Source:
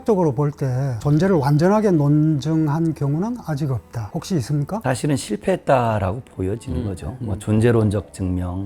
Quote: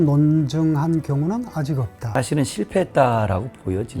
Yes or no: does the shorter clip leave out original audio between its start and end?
yes